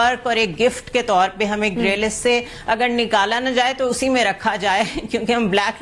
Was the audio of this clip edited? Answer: no; 0 cuts

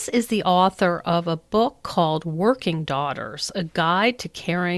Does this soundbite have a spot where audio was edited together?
no; 0 cuts

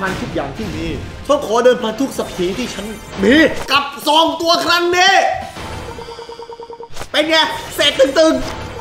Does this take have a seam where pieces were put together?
no; 0 cuts

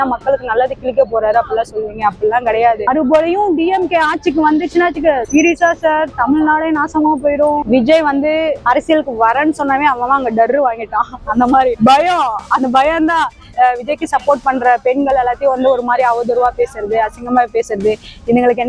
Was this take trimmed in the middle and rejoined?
yes; 3 cuts; at 2.9 s, 7.6 s, 13.5 s

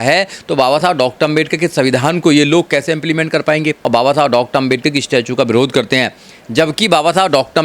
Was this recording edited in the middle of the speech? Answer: yes; 1 cut; at 3.8 s

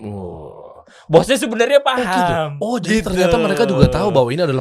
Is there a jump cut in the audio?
no; 0 cuts

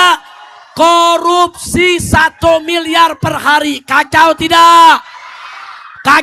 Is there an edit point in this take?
no; 0 cuts

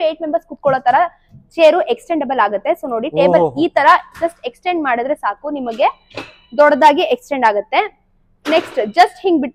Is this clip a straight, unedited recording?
yes; 0 cuts

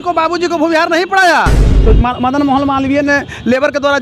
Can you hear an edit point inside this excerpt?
yes; 1 cut; at 1.7 s

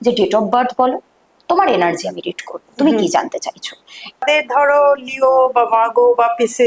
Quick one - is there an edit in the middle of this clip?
yes; 1 cut; at 4.2 s

